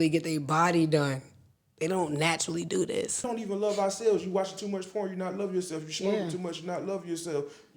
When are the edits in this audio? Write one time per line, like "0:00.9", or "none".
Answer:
0:03.2